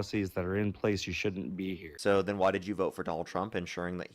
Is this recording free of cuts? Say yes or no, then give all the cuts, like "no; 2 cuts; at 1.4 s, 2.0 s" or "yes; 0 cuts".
no; 1 cut; at 1.8 s